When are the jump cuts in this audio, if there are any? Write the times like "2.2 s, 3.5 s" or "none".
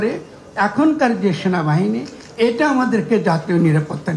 none